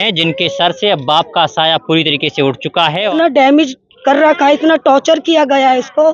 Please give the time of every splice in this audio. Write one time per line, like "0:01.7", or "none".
0:03.1